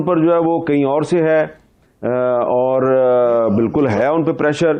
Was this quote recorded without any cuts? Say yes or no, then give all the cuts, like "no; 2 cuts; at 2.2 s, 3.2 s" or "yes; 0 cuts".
yes; 0 cuts